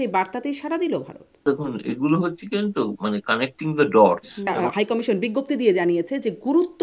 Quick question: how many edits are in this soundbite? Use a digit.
2